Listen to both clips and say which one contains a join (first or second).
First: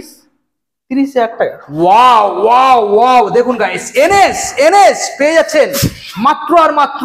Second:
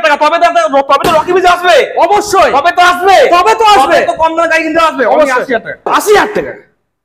second